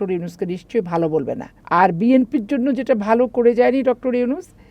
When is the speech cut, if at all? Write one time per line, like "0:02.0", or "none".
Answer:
0:01.5